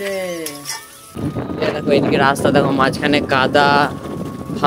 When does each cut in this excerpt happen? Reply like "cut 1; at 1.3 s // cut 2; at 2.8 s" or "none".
cut 1; at 1.1 s